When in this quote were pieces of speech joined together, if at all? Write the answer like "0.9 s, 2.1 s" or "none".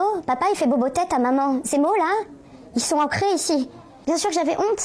3.9 s